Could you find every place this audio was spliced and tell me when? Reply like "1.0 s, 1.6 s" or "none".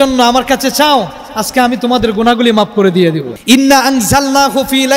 3.3 s